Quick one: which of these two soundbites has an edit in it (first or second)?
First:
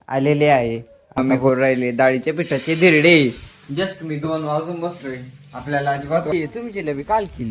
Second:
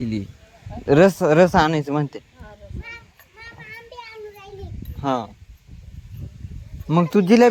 first